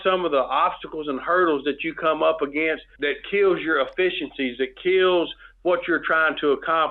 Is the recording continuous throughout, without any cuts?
yes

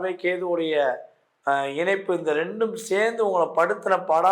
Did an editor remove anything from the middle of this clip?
no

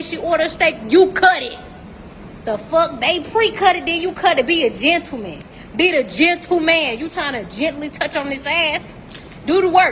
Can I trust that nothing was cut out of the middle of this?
yes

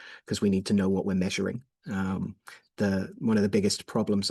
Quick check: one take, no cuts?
yes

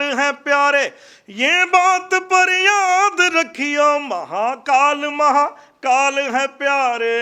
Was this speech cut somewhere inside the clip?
no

